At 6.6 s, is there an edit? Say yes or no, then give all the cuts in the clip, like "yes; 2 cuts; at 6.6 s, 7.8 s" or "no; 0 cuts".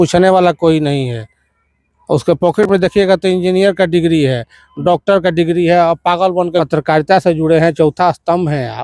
yes; 1 cut; at 6.6 s